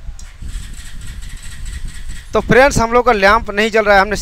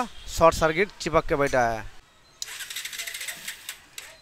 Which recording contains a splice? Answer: second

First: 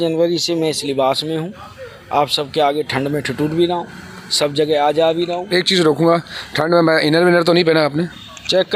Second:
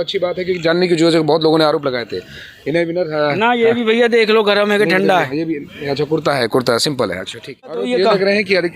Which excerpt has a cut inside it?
second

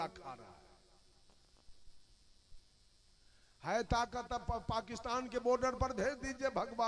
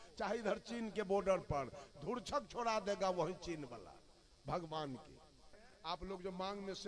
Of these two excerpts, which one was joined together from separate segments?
second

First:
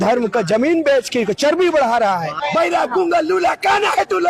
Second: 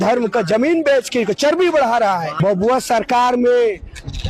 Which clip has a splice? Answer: first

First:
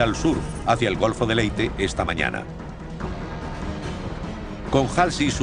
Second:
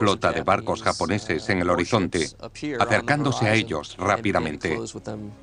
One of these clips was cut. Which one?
first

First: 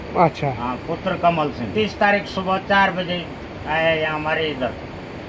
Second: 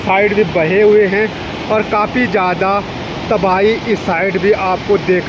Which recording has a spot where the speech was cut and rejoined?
first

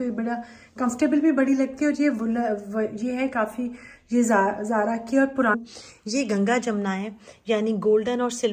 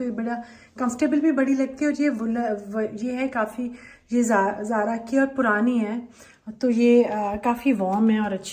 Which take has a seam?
first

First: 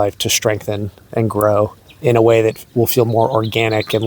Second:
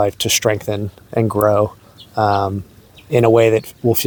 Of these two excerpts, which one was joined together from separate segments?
first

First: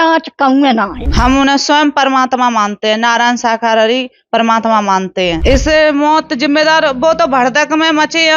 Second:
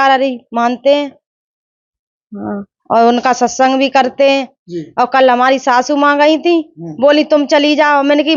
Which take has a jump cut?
first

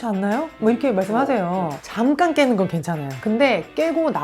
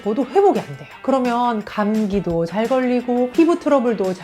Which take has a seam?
first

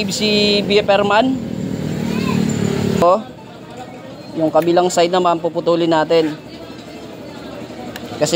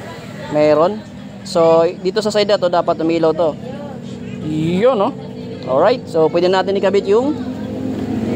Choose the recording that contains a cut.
first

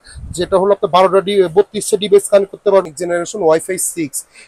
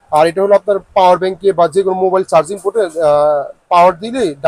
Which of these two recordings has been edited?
first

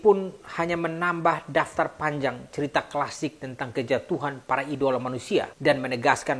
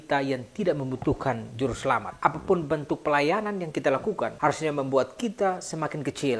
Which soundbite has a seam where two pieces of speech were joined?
second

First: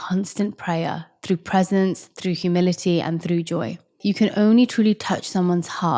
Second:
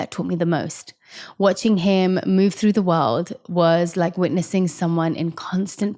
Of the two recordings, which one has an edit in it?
first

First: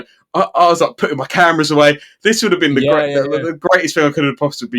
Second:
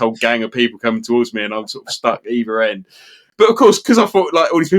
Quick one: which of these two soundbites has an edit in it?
second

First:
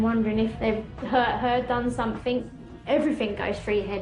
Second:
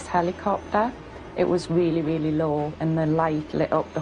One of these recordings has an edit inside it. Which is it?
first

